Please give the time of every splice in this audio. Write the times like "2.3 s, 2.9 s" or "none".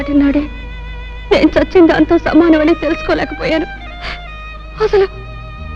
none